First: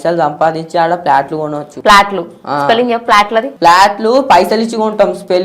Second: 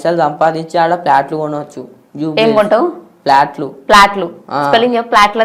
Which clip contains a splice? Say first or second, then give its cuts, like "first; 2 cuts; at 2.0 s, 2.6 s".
first; 2 cuts; at 1.7 s, 3.5 s